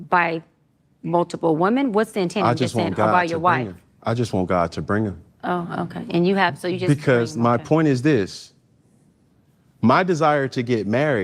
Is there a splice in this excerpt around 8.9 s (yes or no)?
no